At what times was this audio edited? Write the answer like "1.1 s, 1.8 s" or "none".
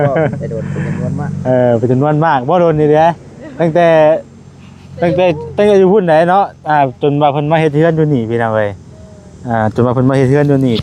none